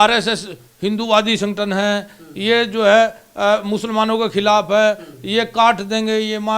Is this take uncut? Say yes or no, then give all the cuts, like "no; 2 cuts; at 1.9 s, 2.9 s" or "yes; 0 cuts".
yes; 0 cuts